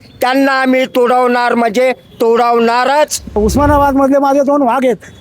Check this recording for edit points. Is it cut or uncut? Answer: cut